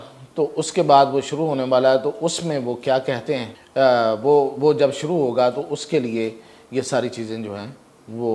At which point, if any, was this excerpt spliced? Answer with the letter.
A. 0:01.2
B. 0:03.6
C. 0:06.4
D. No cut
B